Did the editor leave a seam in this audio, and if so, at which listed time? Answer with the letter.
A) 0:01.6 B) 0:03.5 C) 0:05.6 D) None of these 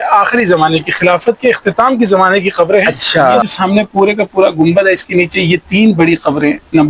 B